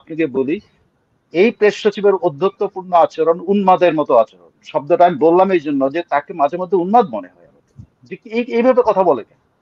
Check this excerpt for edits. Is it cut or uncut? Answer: uncut